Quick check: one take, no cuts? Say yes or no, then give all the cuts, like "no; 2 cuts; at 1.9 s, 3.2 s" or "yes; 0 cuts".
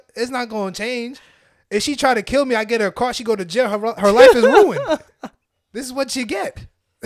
yes; 0 cuts